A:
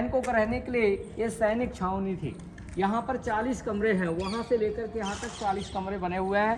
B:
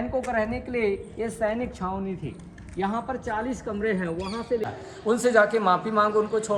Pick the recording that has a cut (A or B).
B